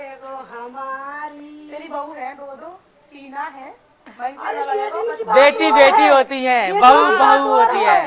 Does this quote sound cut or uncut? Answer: uncut